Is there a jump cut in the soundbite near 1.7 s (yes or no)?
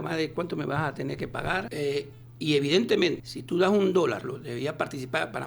yes